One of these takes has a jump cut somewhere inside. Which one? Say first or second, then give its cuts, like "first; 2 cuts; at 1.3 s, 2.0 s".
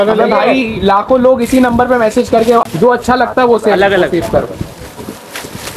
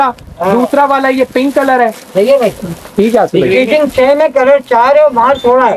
first; 1 cut; at 2.7 s